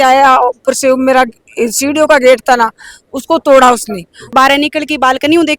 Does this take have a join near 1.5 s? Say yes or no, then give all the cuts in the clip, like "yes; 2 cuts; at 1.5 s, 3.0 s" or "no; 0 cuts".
no; 1 cut; at 4.3 s